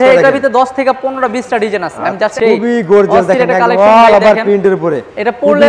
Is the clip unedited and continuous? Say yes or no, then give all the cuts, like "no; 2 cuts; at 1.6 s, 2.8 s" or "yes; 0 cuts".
no; 1 cut; at 2.3 s